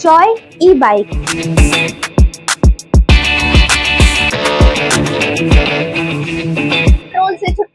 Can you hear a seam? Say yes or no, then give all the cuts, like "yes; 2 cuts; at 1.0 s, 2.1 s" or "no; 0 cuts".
no; 0 cuts